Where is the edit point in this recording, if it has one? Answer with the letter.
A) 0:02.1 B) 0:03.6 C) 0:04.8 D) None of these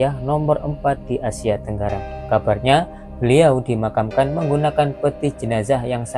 A